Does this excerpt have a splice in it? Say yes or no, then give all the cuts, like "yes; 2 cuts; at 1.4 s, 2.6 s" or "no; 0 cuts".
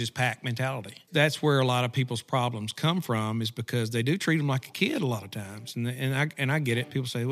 yes; 1 cut; at 1.0 s